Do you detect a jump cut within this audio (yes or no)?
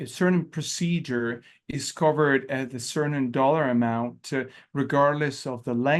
no